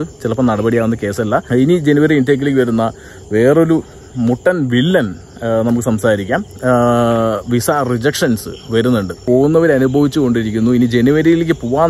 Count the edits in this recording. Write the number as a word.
three